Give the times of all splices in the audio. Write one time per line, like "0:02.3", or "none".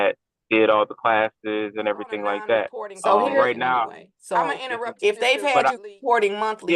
0:04.9